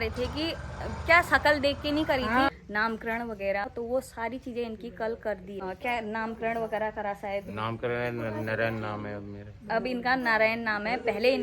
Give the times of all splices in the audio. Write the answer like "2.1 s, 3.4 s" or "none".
2.5 s, 3.7 s, 5.6 s